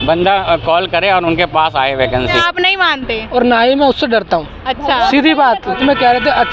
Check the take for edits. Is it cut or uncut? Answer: cut